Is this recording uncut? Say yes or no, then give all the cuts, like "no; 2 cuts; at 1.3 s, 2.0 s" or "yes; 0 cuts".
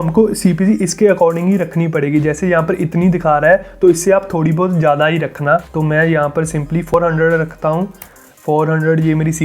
yes; 0 cuts